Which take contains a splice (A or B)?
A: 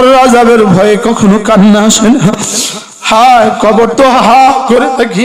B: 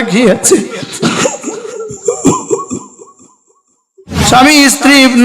B